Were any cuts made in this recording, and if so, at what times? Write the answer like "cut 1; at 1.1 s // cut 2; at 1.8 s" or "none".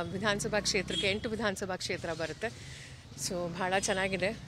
none